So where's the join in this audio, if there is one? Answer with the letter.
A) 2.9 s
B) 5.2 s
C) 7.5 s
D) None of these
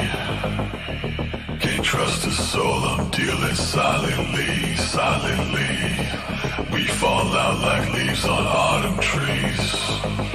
D